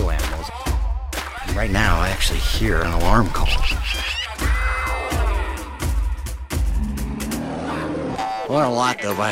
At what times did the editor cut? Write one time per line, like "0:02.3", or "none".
none

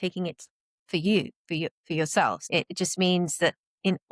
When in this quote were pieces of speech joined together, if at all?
0:02.4

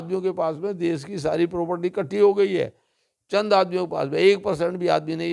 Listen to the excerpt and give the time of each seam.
none

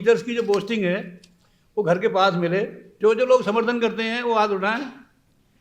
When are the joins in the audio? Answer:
0:02.8

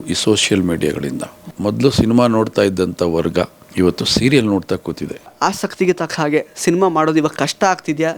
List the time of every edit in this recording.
0:01.5
0:03.6
0:05.3

